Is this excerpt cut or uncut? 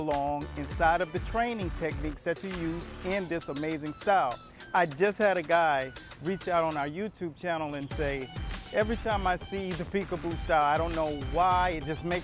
uncut